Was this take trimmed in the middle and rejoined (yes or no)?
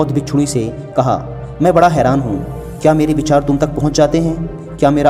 no